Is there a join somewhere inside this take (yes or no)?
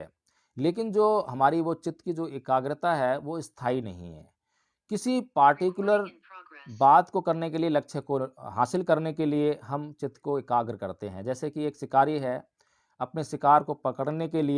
no